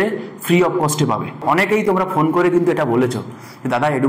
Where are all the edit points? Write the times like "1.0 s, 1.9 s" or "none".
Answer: 1.8 s